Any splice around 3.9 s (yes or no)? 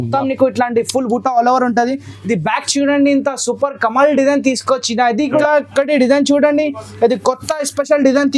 no